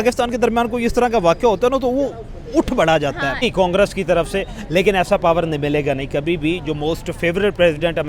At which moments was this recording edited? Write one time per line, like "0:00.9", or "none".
0:03.4